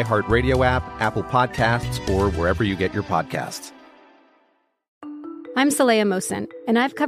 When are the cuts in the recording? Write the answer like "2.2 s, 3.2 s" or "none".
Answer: 4.8 s